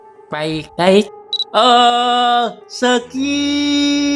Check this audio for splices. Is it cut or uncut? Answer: uncut